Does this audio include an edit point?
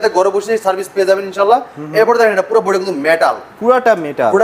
no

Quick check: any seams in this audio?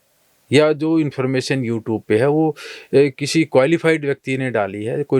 no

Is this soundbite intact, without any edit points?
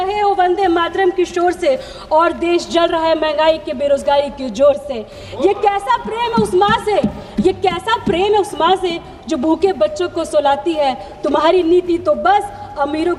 yes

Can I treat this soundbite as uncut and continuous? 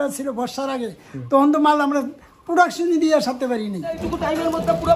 no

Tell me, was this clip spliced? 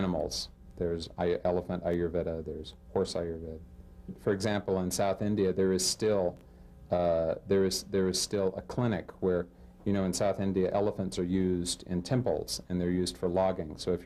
yes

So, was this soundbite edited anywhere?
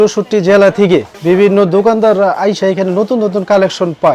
yes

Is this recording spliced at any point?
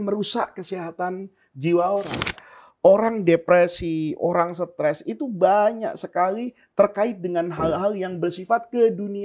yes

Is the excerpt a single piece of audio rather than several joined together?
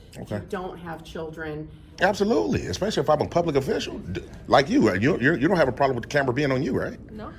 no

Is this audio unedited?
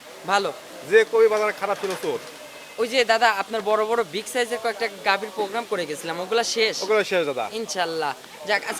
yes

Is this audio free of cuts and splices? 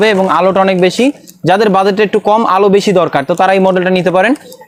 yes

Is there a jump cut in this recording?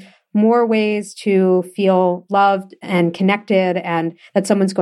no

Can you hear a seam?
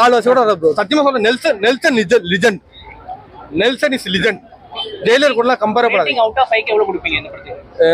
no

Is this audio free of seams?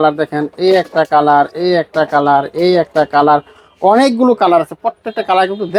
yes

